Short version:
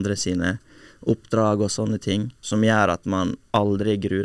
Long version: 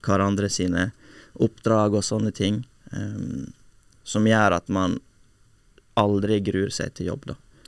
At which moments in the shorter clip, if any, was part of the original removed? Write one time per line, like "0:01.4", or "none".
0:02.4
0:03.4